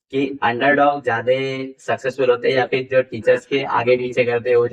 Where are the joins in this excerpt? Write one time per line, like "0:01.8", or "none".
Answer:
none